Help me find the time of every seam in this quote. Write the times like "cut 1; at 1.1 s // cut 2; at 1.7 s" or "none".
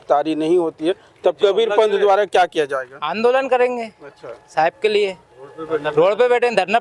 none